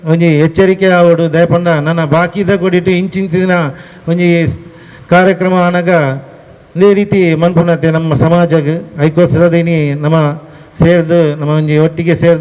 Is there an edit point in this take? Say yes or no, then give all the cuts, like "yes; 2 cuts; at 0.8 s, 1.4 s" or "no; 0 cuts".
no; 0 cuts